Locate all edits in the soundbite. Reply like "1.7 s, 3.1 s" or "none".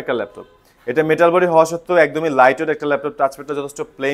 none